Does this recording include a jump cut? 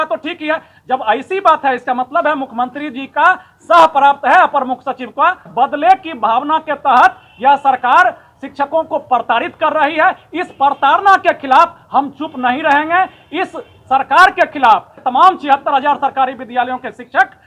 yes; 2 cuts; at 5.5 s, 15.0 s

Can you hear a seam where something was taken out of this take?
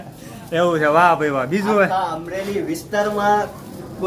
no; 0 cuts

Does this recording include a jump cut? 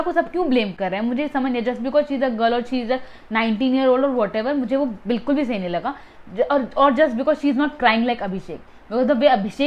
no; 0 cuts

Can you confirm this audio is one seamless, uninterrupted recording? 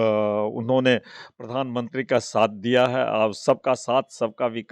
yes; 0 cuts

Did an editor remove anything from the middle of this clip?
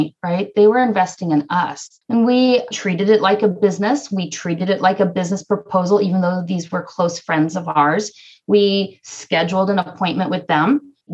yes; 1 cut; at 2.7 s

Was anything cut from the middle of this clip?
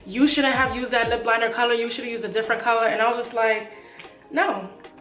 no; 0 cuts

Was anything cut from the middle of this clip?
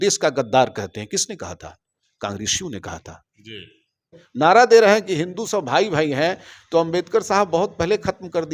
yes; 1 cut; at 4.2 s

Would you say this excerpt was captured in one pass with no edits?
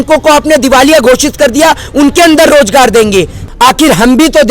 no; 1 cut; at 3.4 s

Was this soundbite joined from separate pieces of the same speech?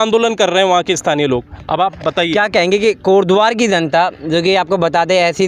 no; 0 cuts

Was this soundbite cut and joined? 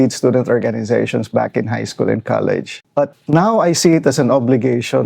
yes; 1 cut; at 2.8 s

